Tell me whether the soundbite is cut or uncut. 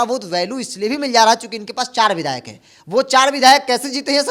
uncut